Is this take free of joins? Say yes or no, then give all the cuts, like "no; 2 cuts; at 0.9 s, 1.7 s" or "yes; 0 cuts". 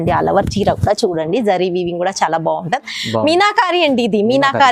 yes; 0 cuts